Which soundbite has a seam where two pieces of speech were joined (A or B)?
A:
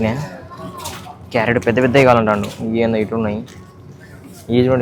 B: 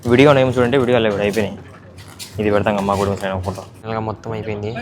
B